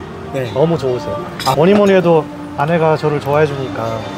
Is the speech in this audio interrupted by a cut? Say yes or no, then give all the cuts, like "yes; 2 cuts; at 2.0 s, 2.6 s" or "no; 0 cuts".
yes; 1 cut; at 1.5 s